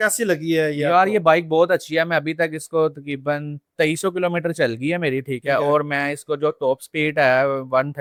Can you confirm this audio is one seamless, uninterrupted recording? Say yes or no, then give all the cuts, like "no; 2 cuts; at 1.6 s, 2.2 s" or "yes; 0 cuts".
yes; 0 cuts